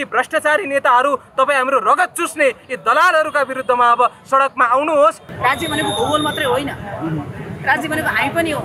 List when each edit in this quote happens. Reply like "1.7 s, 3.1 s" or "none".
5.2 s